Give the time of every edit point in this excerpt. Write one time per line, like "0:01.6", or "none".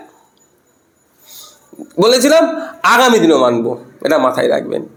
none